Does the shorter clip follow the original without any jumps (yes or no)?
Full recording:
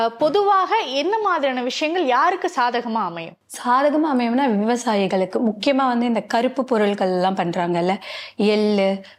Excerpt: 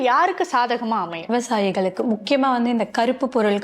no